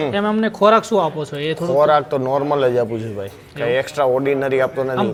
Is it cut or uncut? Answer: uncut